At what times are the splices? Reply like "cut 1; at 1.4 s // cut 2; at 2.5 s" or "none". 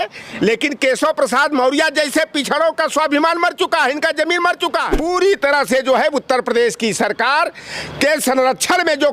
cut 1; at 4.9 s